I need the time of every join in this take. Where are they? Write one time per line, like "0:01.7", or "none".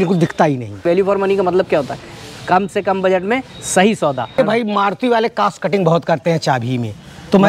0:00.8
0:04.4